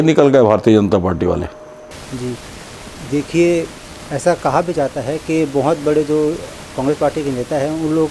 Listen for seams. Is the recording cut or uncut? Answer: uncut